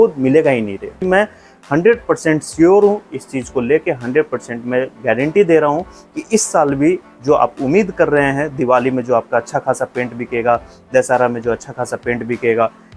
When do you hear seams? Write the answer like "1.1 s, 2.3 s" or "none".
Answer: 1.0 s